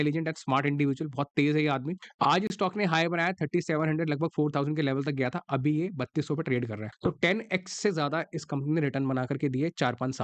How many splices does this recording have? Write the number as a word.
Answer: two